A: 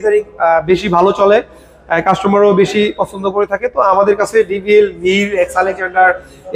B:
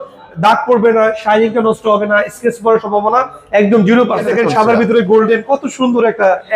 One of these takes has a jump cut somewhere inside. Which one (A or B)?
B